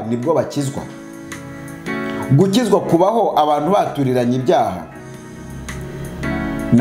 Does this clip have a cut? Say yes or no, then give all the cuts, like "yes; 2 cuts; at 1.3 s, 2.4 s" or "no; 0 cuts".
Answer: no; 0 cuts